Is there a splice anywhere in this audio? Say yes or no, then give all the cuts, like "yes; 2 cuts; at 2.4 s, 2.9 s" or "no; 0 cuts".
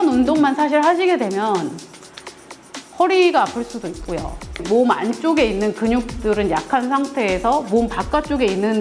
yes; 1 cut; at 4.6 s